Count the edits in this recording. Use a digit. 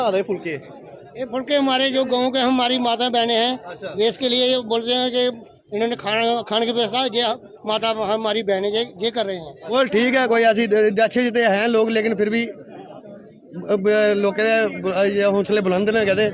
1